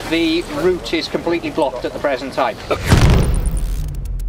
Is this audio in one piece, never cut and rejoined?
no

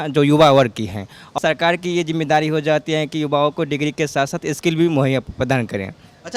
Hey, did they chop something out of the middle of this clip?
yes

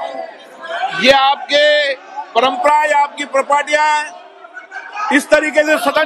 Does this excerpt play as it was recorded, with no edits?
yes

